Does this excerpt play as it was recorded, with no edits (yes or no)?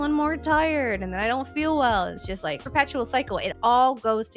no